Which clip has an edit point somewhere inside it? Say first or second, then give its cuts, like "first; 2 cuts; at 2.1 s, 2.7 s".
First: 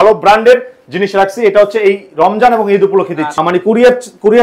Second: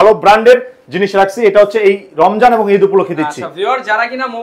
first; 1 cut; at 3.3 s